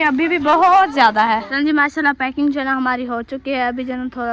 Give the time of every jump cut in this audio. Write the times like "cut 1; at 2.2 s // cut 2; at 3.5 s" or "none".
cut 1; at 1.5 s